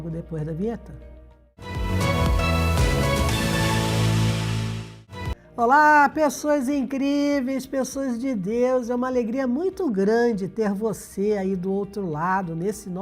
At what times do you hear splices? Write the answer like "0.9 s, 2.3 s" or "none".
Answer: 1.8 s

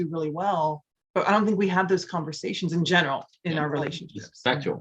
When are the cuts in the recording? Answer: 0.9 s

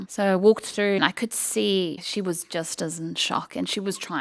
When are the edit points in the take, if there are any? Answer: 1.0 s, 2.0 s

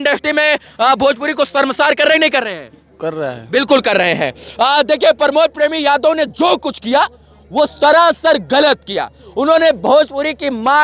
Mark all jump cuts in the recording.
none

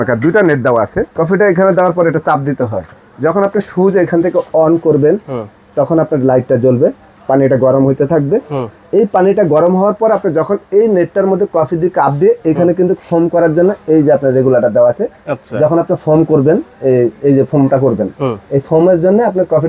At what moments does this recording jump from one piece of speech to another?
1.1 s, 3.0 s

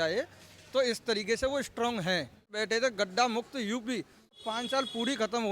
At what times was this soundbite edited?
2.6 s, 4.4 s

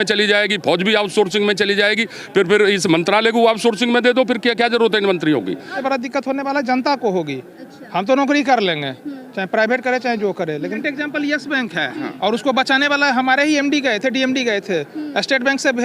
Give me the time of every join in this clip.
5.8 s, 10.8 s

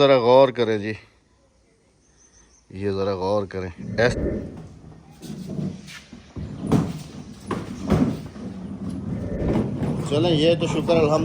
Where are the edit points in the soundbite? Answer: 4.1 s, 9.6 s

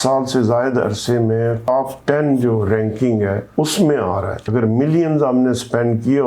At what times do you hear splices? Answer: 1.6 s, 3.4 s, 4.5 s

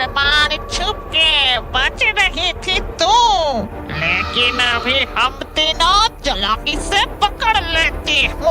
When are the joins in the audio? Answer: none

